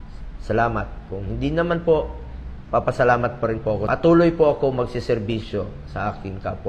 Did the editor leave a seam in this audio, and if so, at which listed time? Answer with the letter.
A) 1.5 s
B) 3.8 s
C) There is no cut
B